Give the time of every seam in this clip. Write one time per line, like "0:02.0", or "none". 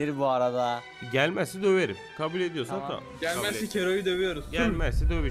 0:00.9
0:02.0